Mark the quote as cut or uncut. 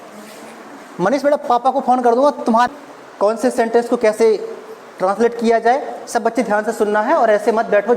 cut